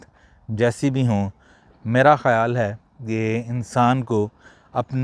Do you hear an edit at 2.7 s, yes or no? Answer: no